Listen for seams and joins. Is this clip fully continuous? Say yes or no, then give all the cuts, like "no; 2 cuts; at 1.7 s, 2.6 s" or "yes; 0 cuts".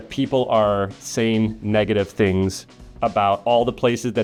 yes; 0 cuts